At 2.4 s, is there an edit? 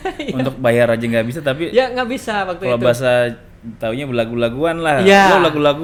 no; 0 cuts

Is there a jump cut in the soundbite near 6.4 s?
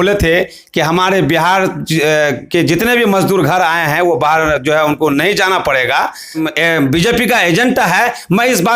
yes; 1 cut; at 6.4 s

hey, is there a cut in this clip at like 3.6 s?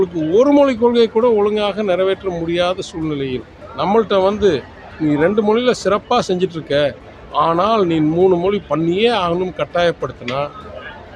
yes; 1 cut; at 3.6 s

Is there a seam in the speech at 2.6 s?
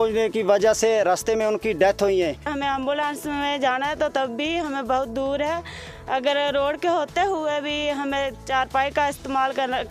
yes; 1 cut; at 2.6 s

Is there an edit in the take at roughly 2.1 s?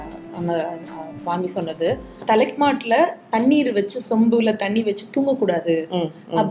yes; 1 cut; at 2.1 s

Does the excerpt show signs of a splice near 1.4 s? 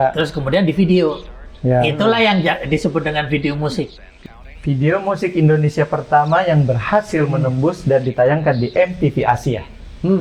no; 1 cut; at 4.1 s

